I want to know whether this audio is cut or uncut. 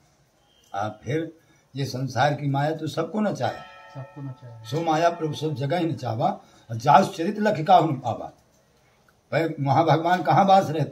uncut